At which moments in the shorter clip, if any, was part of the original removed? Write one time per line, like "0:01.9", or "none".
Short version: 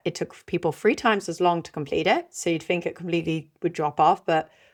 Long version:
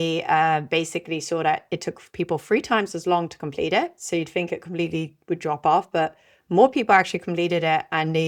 none